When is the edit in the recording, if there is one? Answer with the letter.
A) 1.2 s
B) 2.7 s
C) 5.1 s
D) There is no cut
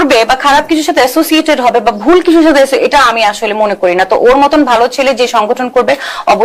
D